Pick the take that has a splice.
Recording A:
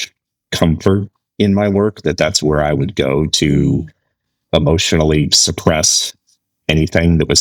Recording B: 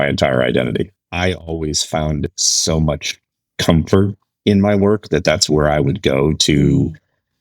B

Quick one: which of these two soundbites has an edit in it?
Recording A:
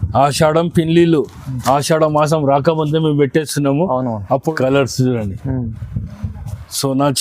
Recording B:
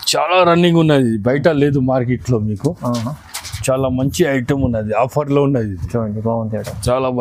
A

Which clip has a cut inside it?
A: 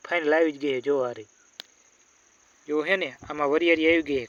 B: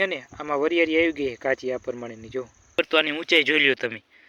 B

